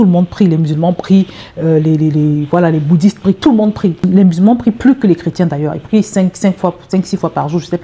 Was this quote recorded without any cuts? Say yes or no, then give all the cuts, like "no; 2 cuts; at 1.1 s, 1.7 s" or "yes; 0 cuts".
no; 1 cut; at 4.0 s